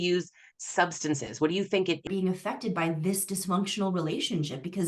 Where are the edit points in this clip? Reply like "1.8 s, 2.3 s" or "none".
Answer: 2.1 s